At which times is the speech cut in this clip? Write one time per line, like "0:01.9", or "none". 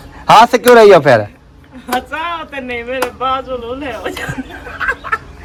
none